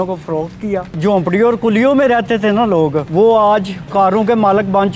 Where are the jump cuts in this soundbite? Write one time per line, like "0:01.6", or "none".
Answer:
0:00.9
0:03.0